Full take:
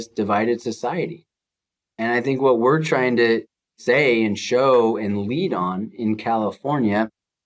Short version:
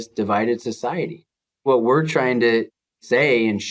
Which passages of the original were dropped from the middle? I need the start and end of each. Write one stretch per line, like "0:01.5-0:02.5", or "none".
0:01.6-0:02.4